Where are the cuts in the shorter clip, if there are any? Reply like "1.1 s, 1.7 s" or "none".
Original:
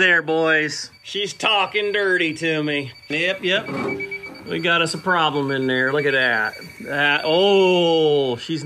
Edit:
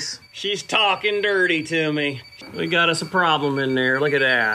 2.3 s